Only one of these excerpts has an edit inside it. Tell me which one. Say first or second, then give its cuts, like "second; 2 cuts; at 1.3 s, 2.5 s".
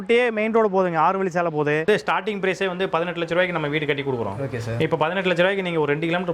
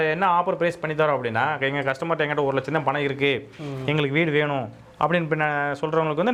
first; 1 cut; at 1.9 s